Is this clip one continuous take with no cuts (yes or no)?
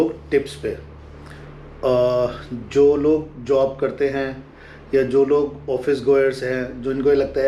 yes